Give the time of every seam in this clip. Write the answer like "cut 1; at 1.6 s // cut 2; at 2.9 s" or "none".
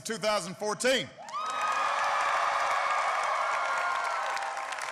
cut 1; at 3.5 s